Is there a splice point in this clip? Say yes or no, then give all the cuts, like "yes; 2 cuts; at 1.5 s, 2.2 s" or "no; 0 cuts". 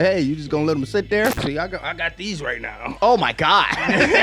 yes; 1 cut; at 1.4 s